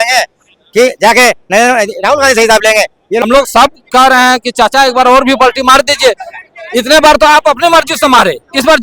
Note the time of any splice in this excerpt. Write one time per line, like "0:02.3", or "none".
0:03.2